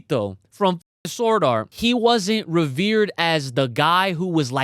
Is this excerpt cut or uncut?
cut